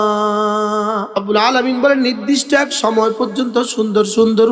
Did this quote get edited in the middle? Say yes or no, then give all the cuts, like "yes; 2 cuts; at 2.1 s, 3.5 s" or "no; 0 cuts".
yes; 1 cut; at 1.1 s